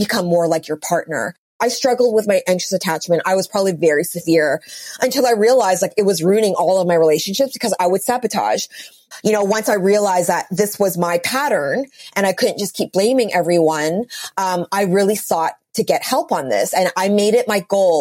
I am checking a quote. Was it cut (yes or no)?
yes